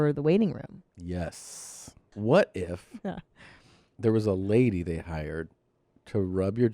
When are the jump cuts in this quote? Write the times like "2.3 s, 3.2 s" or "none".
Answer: 2.1 s